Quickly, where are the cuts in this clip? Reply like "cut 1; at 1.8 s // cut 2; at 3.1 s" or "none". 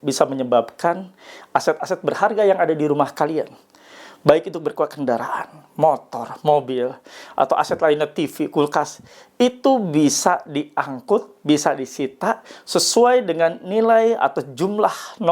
none